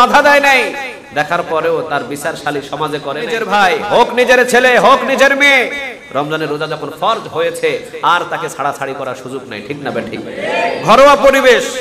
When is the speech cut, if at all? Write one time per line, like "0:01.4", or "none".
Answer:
0:03.4